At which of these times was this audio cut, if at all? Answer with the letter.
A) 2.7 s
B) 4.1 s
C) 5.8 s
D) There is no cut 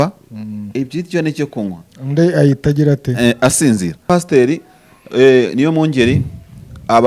B